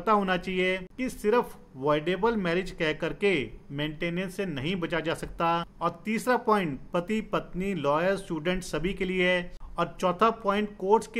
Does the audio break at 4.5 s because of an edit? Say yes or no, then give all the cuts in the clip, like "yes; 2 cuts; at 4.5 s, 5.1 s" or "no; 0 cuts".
no; 3 cuts; at 0.9 s, 5.7 s, 9.6 s